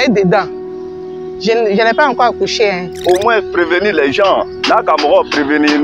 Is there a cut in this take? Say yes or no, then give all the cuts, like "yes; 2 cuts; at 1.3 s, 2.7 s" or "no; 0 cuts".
yes; 1 cut; at 3.0 s